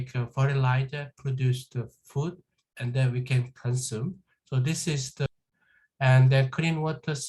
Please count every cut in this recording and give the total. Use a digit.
1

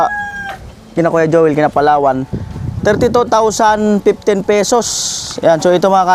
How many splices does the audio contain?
0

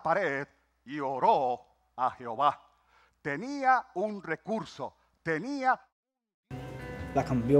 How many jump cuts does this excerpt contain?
1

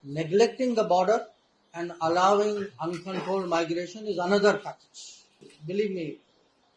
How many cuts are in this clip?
1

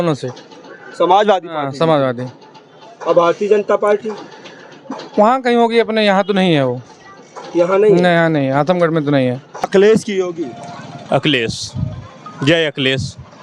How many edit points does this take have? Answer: 1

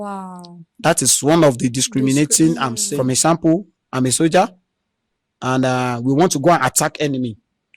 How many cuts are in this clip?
1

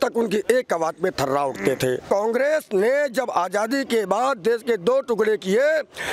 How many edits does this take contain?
1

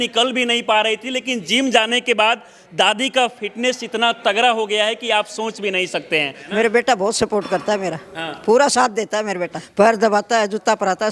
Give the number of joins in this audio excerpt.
2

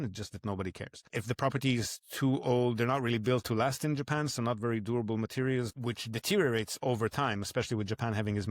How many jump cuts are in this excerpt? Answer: 2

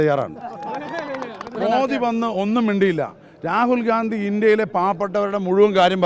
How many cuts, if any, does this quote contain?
1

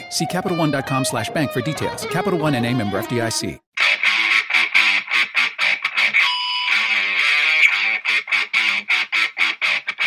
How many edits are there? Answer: 1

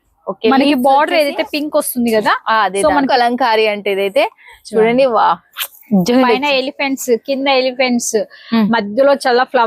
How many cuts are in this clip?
1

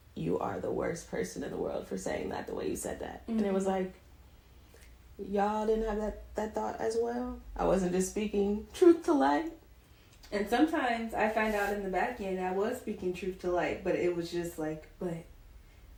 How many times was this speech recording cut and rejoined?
0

